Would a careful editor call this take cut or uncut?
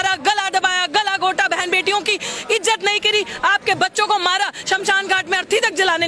uncut